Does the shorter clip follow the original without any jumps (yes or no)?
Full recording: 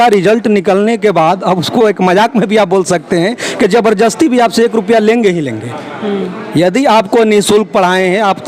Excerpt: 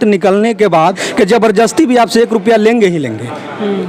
no